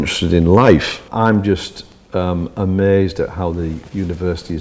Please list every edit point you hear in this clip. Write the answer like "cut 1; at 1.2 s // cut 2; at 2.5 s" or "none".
cut 1; at 1.0 s